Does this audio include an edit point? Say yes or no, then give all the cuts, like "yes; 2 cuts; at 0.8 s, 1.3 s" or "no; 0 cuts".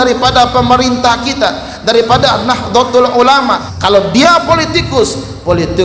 yes; 1 cut; at 3.7 s